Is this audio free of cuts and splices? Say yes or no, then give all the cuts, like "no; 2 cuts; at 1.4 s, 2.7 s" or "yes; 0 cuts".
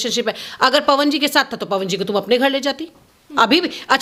yes; 0 cuts